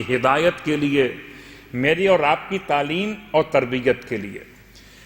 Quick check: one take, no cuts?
yes; 0 cuts

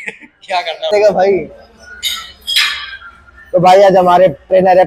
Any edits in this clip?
yes; 1 cut; at 0.9 s

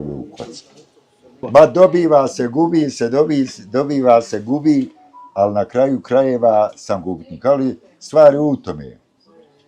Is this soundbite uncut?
no; 1 cut; at 1.4 s

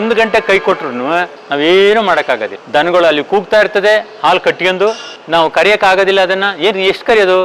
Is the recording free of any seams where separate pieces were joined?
no; 1 cut; at 1.4 s

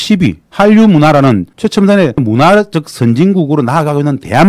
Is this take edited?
yes; 1 cut; at 2.2 s

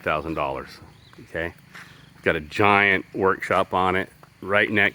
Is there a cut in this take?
no; 0 cuts

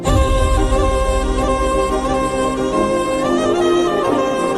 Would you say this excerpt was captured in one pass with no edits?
yes; 0 cuts

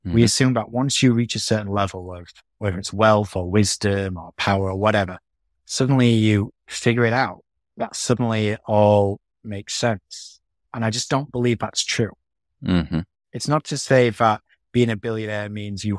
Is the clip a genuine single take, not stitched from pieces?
yes; 0 cuts

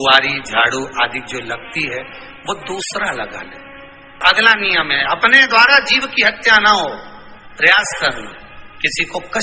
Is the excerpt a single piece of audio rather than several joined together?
no; 1 cut; at 4.2 s

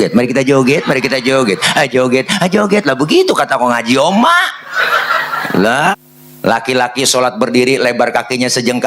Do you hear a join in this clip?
yes; 1 cut; at 5.9 s

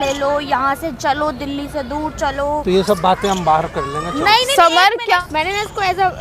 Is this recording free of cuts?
no; 1 cut; at 5.2 s

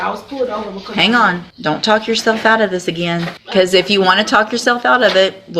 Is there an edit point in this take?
yes; 2 cuts; at 1.5 s, 3.4 s

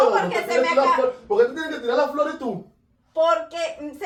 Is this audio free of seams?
yes; 0 cuts

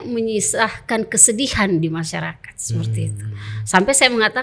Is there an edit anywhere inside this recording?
no; 0 cuts

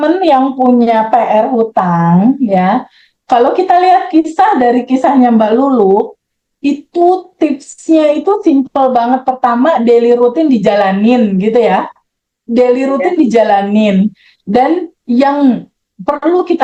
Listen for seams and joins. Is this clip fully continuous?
yes; 0 cuts

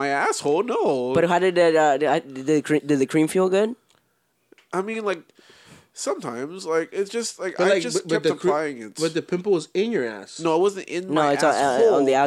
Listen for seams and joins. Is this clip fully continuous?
yes; 0 cuts

